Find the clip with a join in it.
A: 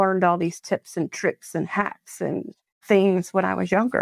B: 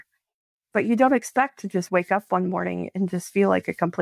A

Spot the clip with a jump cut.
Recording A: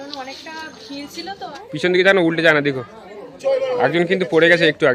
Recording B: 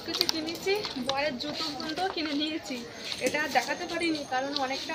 A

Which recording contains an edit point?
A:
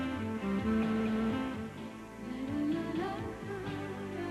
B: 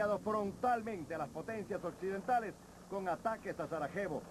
A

